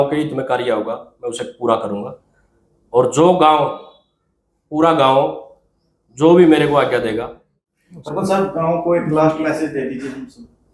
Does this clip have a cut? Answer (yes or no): no